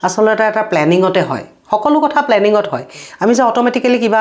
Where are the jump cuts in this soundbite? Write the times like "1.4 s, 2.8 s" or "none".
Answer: none